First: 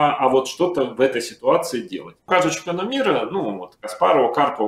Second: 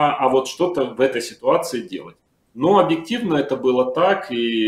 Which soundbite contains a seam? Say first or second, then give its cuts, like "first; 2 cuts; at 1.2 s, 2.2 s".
first; 1 cut; at 2.2 s